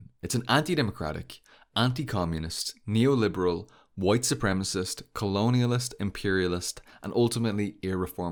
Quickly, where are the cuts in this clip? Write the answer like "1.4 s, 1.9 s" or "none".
none